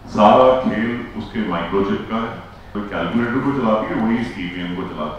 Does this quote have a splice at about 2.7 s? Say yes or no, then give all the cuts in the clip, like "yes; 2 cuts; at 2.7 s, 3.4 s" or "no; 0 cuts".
yes; 1 cut; at 2.7 s